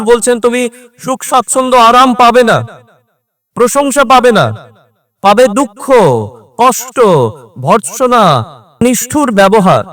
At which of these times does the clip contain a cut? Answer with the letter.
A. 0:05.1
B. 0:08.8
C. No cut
B